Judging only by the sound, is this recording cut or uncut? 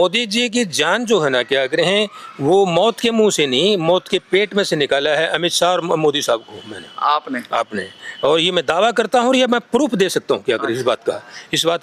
uncut